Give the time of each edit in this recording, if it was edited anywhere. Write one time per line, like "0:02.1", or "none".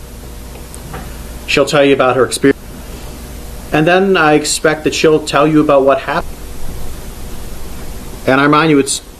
0:02.5
0:06.2